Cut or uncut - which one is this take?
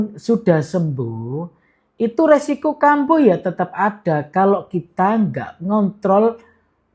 uncut